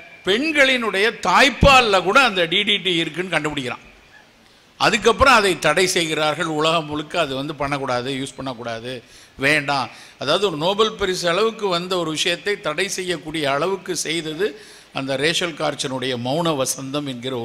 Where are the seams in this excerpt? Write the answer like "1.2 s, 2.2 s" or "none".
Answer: none